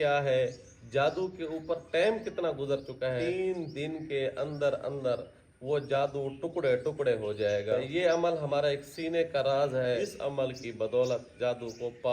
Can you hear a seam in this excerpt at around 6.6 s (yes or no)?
no